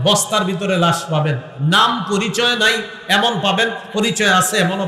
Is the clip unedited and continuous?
yes; 0 cuts

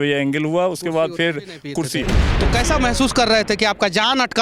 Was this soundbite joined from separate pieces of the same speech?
yes; 1 cut; at 2.2 s

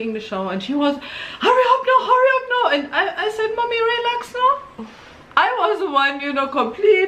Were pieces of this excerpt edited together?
no; 0 cuts

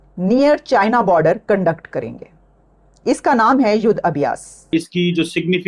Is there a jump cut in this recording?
yes; 1 cut; at 4.7 s

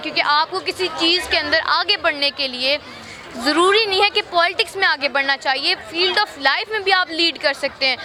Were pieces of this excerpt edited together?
no; 0 cuts

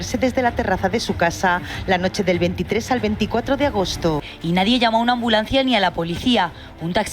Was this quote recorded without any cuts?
no; 1 cut; at 4.3 s

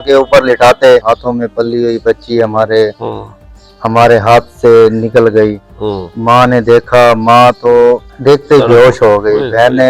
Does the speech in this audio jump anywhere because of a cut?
yes; 1 cut; at 1.0 s

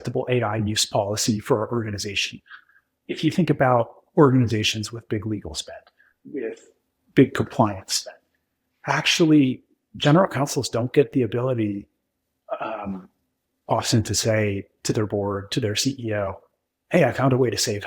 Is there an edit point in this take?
no; 0 cuts

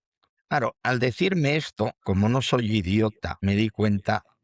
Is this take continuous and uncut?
no; 3 cuts; at 0.8 s, 2.0 s, 3.3 s

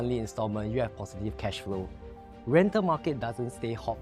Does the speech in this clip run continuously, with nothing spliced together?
yes; 0 cuts

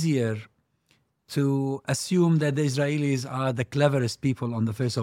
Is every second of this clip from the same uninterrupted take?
yes; 0 cuts

